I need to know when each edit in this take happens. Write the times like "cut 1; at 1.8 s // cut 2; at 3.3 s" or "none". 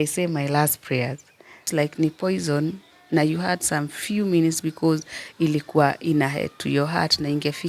cut 1; at 1.7 s